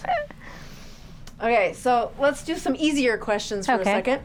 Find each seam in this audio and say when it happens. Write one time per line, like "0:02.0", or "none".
none